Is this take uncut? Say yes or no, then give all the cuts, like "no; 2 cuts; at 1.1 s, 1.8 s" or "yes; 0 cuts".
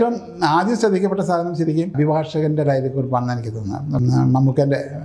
no; 2 cuts; at 1.9 s, 4.0 s